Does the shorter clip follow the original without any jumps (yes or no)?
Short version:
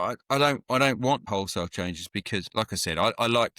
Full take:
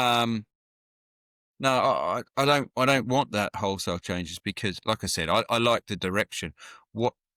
no